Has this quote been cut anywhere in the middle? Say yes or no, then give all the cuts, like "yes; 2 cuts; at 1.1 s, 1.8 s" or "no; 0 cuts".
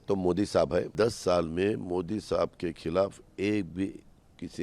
yes; 1 cut; at 0.9 s